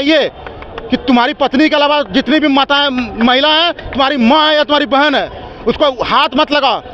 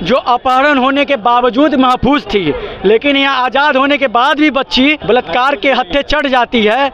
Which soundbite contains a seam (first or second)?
second